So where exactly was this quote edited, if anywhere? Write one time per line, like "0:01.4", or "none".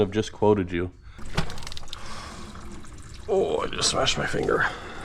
0:01.1

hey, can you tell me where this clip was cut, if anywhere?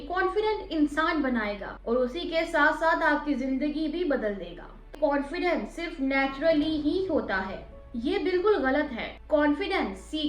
0:01.7
0:04.9

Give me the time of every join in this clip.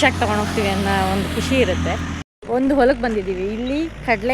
0:02.2

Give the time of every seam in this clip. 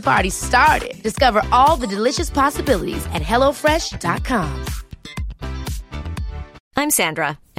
0:06.6

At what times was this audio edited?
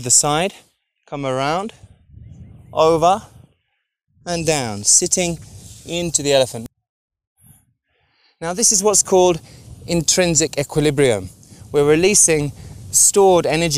0:06.6

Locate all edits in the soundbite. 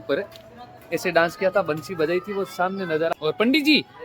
0:03.1

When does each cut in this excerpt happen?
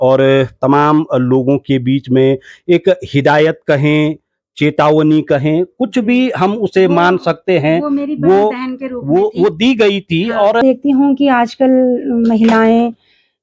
0:10.6

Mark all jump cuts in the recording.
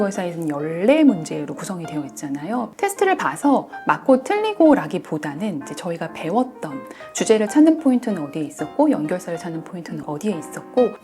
0:02.7

